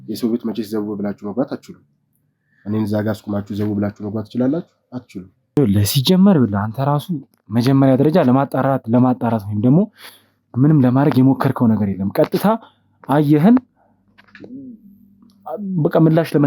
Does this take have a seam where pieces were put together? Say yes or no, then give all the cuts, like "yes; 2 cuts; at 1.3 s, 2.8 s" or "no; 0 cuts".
no; 0 cuts